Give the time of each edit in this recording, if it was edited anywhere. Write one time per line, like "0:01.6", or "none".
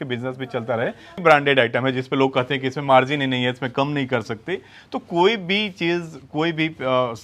0:01.2